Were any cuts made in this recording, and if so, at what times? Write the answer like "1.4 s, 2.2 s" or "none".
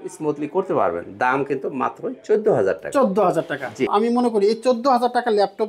3.9 s